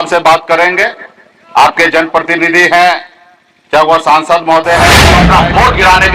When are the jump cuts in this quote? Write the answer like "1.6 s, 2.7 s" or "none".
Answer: 5.0 s